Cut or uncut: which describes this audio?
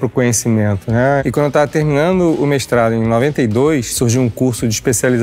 cut